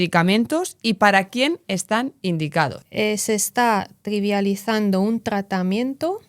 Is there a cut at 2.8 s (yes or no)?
yes